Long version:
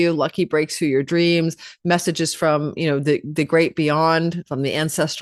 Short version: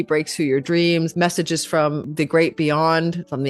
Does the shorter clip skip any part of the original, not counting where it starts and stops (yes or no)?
yes